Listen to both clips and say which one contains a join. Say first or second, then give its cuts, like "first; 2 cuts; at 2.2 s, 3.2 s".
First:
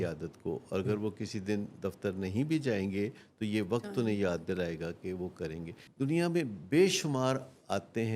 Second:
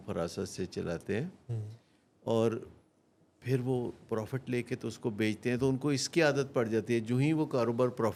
first; 1 cut; at 5.8 s